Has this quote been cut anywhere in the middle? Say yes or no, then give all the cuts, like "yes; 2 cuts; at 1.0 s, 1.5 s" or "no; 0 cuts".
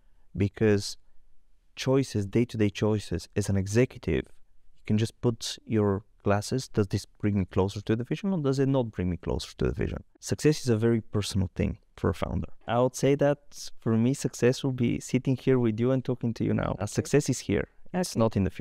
yes; 3 cuts; at 10.0 s, 12.6 s, 16.9 s